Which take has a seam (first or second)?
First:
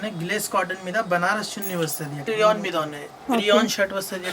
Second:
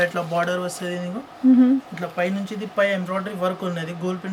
first